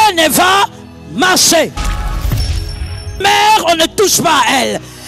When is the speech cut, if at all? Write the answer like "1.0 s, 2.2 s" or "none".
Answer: none